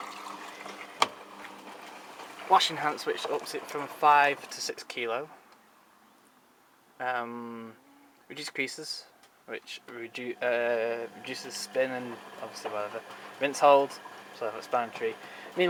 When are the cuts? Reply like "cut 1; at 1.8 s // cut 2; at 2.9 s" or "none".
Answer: none